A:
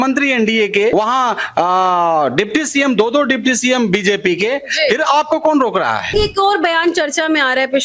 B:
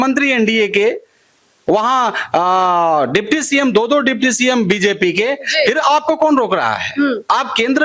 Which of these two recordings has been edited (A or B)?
A